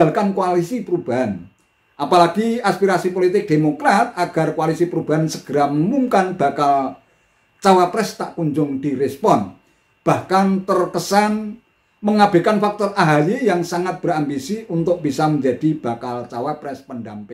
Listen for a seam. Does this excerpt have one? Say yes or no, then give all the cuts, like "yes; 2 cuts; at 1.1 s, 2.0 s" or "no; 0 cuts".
no; 0 cuts